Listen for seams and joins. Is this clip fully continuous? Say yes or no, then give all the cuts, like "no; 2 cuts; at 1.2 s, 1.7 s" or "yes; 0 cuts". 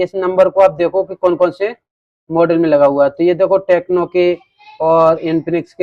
yes; 0 cuts